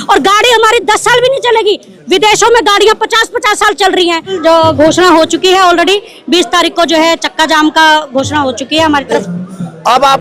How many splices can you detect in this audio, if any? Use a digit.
2